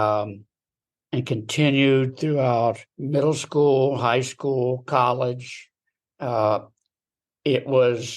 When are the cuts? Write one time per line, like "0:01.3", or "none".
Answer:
0:02.9

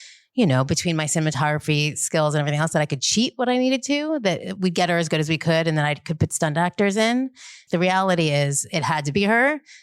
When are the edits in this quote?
0:07.6

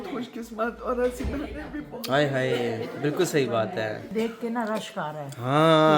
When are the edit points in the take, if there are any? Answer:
0:04.1

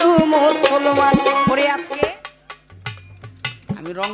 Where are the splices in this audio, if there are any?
0:01.8

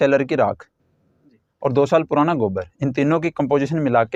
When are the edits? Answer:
none

